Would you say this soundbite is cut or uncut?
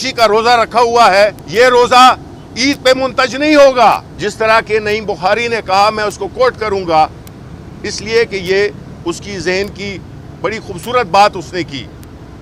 cut